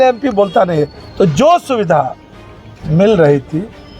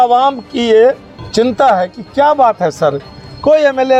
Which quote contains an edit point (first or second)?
first